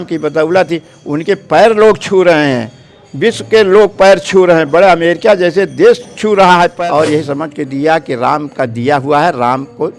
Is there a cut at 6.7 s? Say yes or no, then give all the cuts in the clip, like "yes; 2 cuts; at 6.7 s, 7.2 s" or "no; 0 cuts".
yes; 1 cut; at 6.7 s